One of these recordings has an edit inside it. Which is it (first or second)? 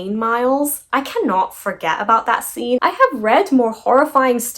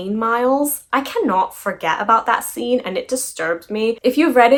first